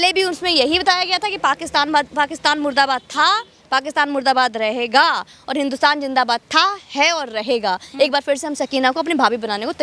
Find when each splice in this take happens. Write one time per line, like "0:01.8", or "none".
none